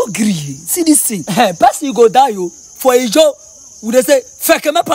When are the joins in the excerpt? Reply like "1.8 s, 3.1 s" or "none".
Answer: 1.2 s